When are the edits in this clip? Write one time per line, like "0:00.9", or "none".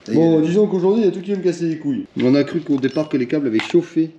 0:02.1